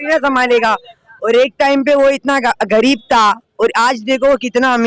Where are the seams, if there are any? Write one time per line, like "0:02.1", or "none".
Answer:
none